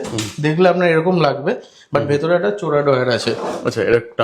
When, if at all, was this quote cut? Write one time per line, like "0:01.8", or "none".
none